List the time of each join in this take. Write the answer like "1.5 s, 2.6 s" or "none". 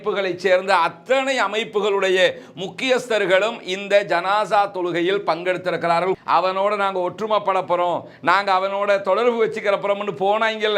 6.2 s